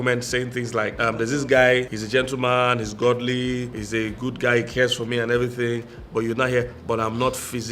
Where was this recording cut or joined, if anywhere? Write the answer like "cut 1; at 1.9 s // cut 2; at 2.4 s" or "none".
cut 1; at 0.9 s // cut 2; at 2.0 s // cut 3; at 3.7 s